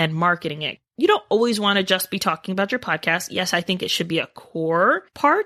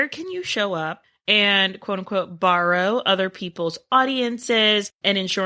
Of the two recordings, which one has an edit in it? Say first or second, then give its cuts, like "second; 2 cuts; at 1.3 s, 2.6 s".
second; 1 cut; at 1.1 s